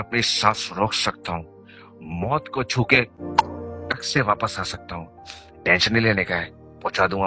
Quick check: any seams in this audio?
no; 0 cuts

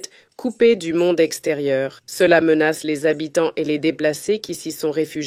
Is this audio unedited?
no; 1 cut; at 2.0 s

